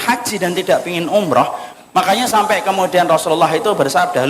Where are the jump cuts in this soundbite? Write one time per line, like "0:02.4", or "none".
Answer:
0:01.6